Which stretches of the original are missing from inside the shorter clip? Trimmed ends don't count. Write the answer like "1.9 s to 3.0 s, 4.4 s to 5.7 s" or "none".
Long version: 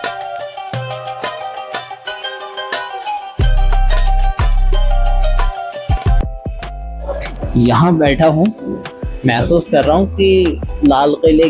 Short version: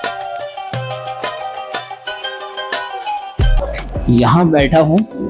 3.5 s to 7.0 s